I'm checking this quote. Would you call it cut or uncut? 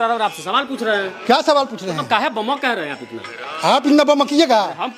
uncut